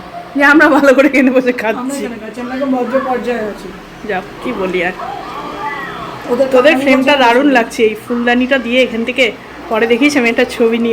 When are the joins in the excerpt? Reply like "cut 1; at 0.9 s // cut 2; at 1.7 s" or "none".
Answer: none